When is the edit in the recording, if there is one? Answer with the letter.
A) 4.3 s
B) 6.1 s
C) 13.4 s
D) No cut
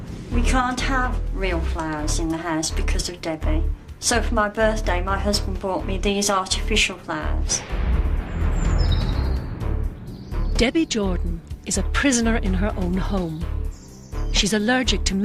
A